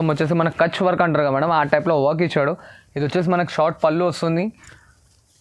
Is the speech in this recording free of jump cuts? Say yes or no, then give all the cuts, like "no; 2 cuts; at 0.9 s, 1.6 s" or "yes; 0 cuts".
yes; 0 cuts